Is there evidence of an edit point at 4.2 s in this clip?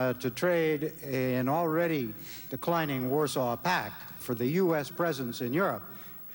yes; 1 cut; at 4.2 s

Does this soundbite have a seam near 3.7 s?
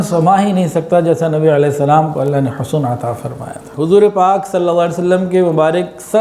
yes; 1 cut; at 3.7 s

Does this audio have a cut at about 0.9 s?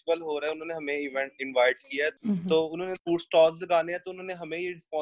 no; 2 cuts; at 2.2 s, 3.0 s

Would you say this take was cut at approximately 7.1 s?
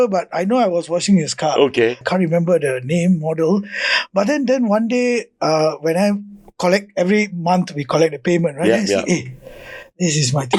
no; 1 cut; at 2.0 s

